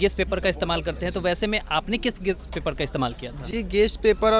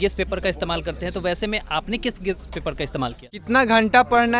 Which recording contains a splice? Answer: second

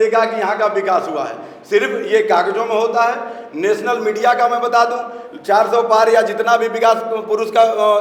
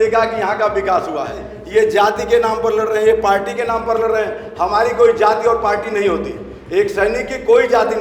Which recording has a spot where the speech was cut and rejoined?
second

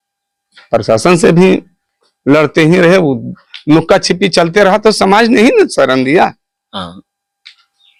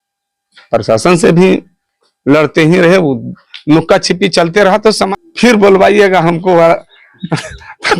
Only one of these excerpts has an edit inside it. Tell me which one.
second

